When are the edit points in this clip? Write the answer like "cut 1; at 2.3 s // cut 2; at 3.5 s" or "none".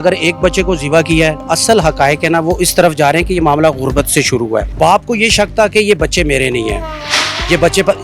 cut 1; at 1.4 s // cut 2; at 4.7 s